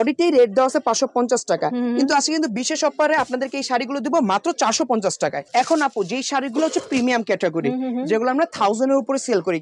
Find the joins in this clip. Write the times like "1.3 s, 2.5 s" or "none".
5.4 s